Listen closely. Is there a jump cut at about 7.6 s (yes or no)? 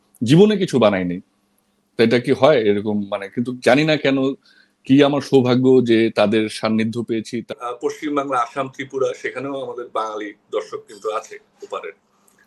yes